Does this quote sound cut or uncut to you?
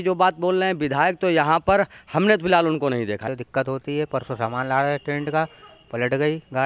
cut